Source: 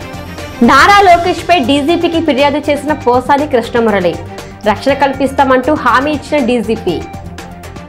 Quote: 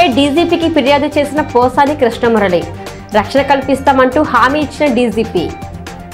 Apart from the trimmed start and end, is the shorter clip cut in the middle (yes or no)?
no